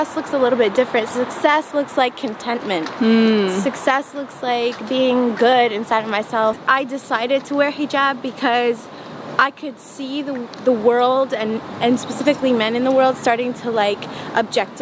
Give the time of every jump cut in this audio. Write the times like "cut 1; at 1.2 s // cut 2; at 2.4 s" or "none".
cut 1; at 6.6 s